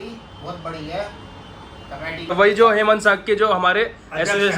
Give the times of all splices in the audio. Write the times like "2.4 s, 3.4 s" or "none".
2.3 s

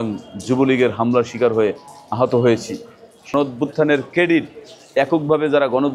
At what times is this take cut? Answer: 3.3 s

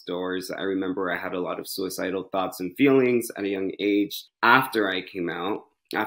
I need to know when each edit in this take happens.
4.2 s

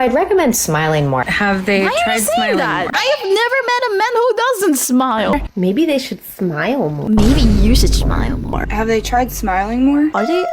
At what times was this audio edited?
5.3 s, 8.6 s

